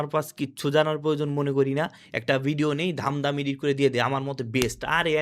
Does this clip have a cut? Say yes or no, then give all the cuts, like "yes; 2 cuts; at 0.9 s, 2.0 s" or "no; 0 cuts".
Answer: no; 0 cuts